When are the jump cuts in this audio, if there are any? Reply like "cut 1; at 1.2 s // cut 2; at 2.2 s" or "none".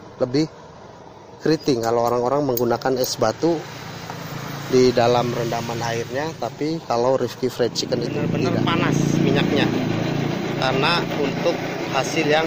cut 1; at 8.2 s